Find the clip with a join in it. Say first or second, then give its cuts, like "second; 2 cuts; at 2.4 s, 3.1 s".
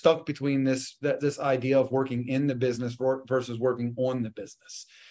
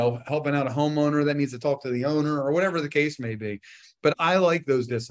second; 1 cut; at 4.1 s